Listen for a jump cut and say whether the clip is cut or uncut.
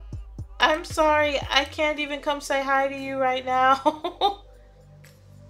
cut